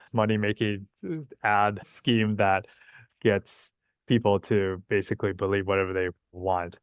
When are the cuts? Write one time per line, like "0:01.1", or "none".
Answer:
0:01.9